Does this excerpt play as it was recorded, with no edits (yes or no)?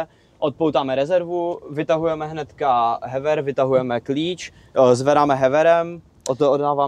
yes